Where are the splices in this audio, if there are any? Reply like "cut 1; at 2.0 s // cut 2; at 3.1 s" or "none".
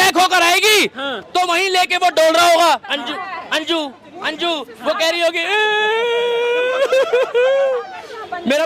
none